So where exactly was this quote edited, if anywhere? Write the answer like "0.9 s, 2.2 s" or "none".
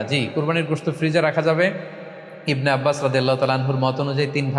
none